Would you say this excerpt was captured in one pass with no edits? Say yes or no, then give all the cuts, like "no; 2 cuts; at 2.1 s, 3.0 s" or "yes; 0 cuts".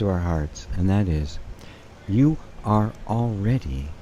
yes; 0 cuts